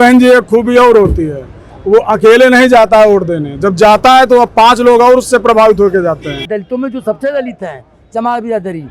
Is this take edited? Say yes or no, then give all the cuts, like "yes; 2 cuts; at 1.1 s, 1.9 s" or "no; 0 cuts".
yes; 1 cut; at 6.5 s